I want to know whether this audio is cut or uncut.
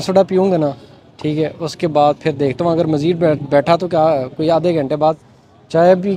uncut